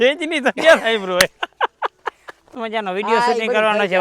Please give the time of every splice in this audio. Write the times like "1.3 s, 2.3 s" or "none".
2.5 s